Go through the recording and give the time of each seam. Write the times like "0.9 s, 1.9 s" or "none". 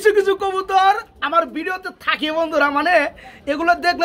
none